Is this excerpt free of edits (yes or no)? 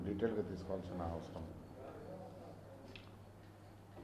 yes